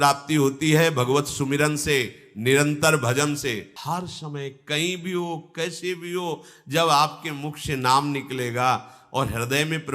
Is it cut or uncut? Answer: cut